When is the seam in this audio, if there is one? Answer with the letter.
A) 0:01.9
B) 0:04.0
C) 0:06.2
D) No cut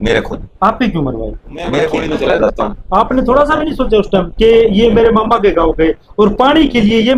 A